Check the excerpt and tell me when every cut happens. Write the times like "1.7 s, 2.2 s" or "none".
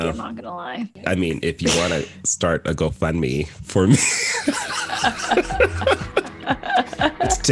1.0 s